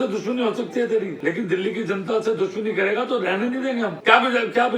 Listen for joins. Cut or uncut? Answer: cut